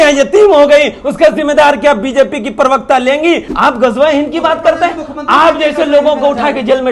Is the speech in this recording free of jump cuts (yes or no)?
no